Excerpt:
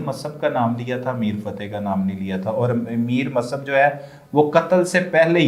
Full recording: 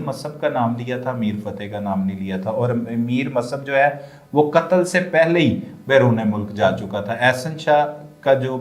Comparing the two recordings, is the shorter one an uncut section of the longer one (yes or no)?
yes